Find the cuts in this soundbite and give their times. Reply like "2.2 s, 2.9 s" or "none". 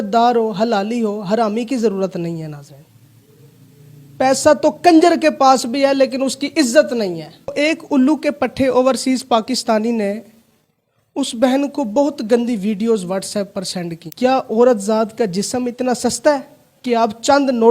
7.5 s, 14.0 s